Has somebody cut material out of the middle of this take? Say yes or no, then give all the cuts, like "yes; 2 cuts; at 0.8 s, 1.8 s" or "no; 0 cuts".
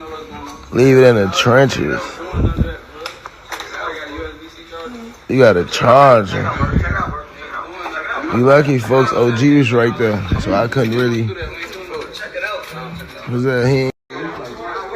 yes; 1 cut; at 14.1 s